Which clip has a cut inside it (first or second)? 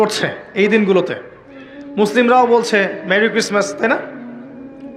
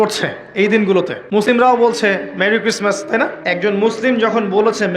second